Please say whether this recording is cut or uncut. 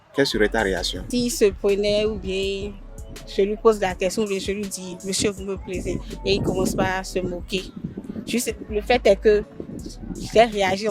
cut